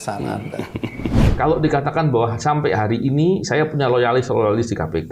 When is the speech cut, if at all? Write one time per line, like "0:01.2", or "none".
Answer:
0:01.2